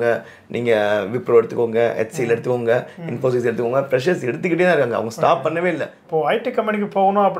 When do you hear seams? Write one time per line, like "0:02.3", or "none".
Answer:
0:05.9